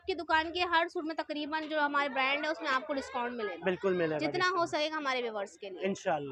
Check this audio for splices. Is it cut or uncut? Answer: uncut